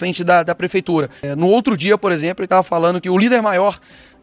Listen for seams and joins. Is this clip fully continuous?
no; 1 cut; at 1.2 s

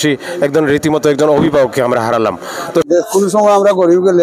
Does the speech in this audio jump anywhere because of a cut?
yes; 1 cut; at 2.9 s

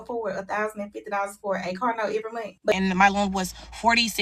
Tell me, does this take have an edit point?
yes; 1 cut; at 2.7 s

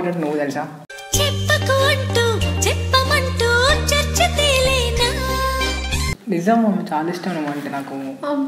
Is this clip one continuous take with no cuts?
yes; 0 cuts

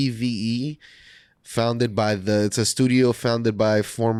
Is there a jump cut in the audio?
no; 0 cuts

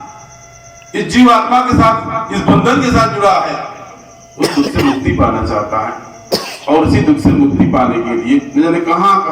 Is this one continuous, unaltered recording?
yes; 0 cuts

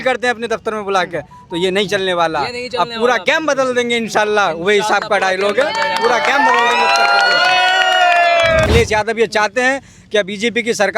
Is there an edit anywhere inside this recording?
yes; 1 cut; at 8.7 s

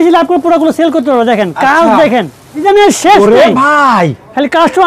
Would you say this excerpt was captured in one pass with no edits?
no; 1 cut; at 2.6 s

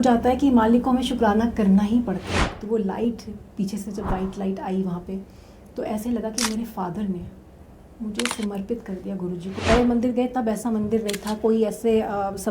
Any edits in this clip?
yes; 2 cuts; at 2.3 s, 9.6 s

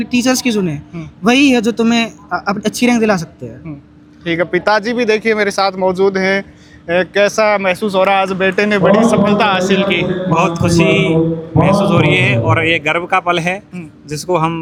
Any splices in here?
no; 0 cuts

